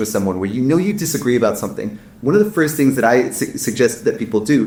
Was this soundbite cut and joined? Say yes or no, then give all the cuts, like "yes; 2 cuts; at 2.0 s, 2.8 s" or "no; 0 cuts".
no; 0 cuts